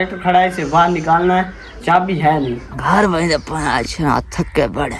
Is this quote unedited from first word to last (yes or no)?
no